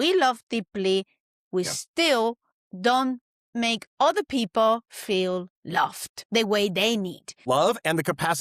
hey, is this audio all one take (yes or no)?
no